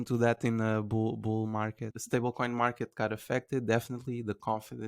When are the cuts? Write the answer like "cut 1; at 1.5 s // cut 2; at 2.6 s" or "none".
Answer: cut 1; at 1.8 s

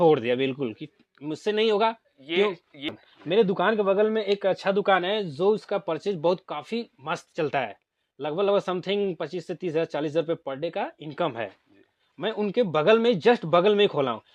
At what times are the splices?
cut 1; at 2.9 s

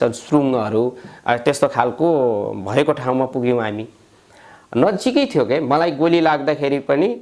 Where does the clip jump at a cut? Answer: none

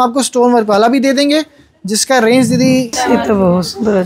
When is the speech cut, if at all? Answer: cut 1; at 2.9 s

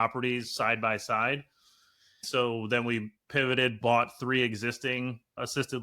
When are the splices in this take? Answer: cut 1; at 2.2 s

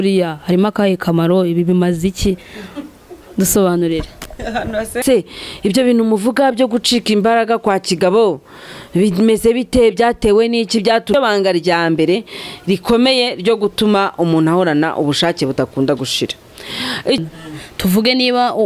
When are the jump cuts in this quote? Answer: cut 1; at 5.0 s // cut 2; at 11.1 s // cut 3; at 17.2 s

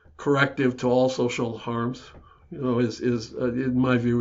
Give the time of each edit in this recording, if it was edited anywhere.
none

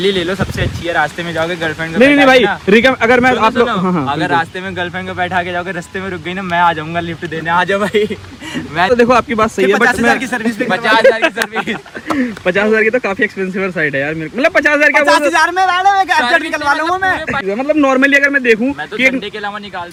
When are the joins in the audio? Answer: none

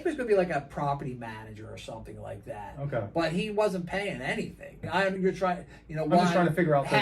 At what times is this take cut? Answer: cut 1; at 5.2 s

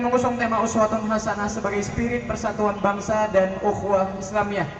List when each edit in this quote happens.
cut 1; at 3.4 s

